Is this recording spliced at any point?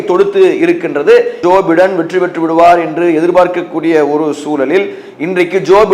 yes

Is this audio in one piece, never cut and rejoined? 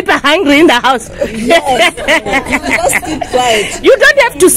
yes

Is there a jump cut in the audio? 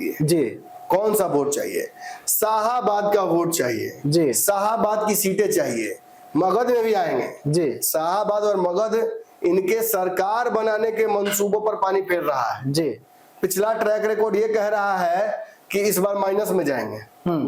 no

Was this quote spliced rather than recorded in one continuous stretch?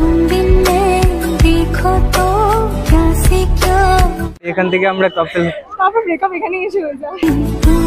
no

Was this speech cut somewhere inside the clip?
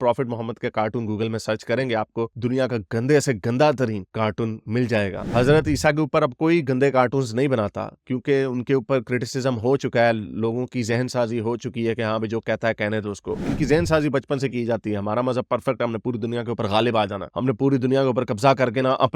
yes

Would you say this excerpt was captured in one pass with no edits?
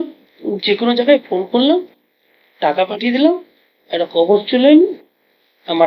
yes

